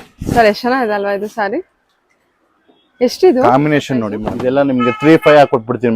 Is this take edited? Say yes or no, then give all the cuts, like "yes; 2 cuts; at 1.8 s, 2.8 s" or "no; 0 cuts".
yes; 1 cut; at 4.2 s